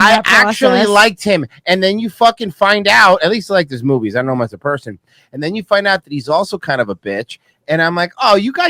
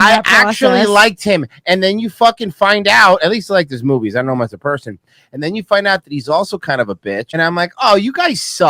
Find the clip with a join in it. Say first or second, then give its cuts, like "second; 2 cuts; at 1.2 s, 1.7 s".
second; 1 cut; at 7.4 s